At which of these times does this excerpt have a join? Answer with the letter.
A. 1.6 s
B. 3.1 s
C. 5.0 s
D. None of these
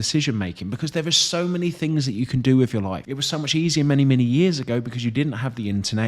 B